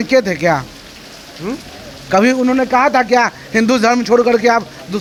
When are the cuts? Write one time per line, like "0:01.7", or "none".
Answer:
none